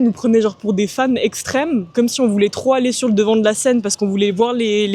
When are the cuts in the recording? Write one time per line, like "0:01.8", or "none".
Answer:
none